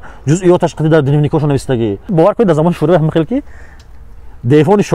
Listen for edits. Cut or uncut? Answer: cut